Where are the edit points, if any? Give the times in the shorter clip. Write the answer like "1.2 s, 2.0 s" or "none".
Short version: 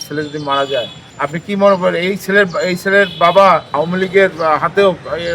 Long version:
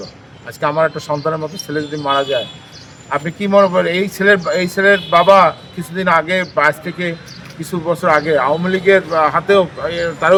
1.0 s, 3.7 s